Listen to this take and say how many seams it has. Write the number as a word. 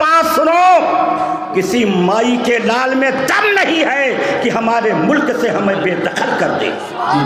zero